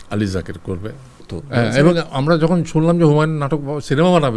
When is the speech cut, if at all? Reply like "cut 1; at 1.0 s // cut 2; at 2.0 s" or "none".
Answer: cut 1; at 1.3 s